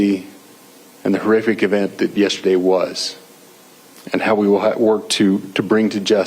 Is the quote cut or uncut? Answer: cut